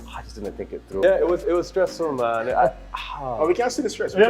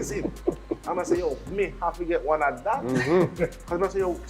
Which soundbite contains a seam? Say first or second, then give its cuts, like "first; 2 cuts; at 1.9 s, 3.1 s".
first; 1 cut; at 1.0 s